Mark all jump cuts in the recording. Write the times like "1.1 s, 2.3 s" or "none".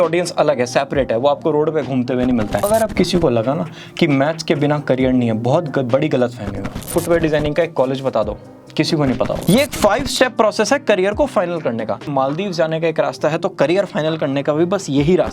2.6 s, 6.9 s, 9.4 s, 12.1 s